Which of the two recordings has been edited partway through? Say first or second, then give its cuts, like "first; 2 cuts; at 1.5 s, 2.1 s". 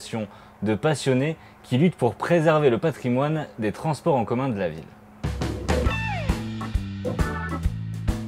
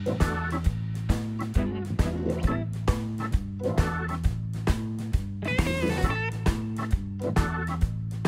second; 1 cut; at 6.9 s